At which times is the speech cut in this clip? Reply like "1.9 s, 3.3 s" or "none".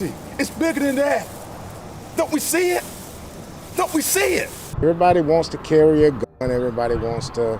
4.8 s